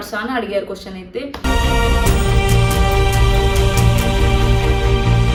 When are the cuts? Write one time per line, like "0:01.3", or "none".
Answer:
none